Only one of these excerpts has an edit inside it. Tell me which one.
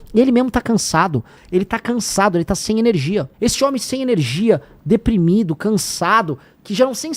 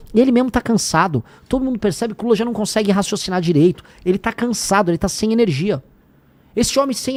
first; 2 cuts; at 1.3 s, 3.3 s

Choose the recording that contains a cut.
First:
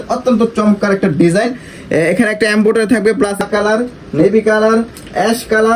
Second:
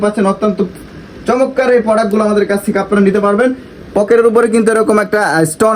first; 1 cut; at 3.4 s

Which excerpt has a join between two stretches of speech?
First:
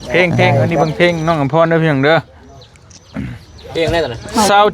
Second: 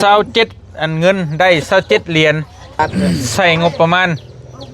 second; 1 cut; at 2.8 s

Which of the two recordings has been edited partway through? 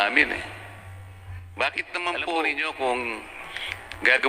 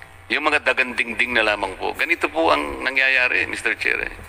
first; 1 cut; at 2.5 s

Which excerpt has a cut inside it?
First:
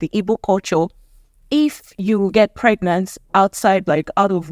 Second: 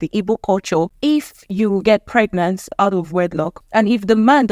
second; 3 cuts; at 0.9 s, 2.7 s, 3.6 s

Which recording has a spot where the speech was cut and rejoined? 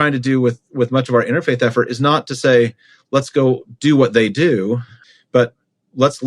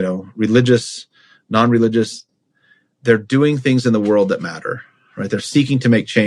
first; 1 cut; at 5.0 s

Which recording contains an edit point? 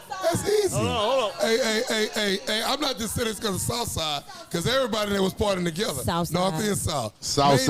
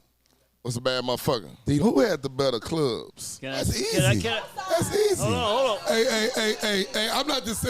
second; 1 cut; at 1.8 s

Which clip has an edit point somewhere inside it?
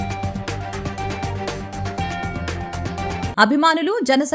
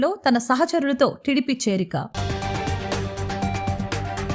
first; 1 cut; at 3.3 s

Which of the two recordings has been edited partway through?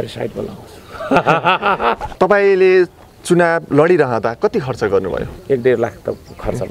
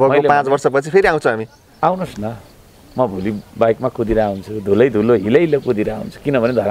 first; 2 cuts; at 2.1 s, 5.3 s

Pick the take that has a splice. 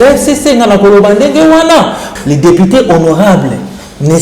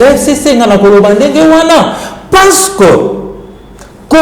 first; 1 cut; at 2.1 s

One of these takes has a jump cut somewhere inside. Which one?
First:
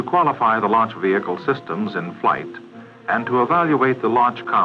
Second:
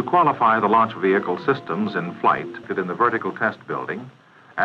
first; 1 cut; at 2.7 s

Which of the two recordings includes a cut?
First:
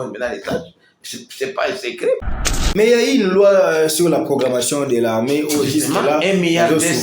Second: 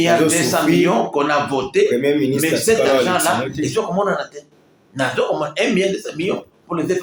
first; 1 cut; at 2.4 s

